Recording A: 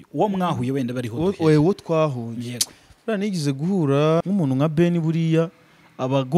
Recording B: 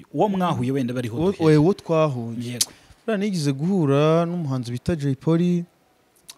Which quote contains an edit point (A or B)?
A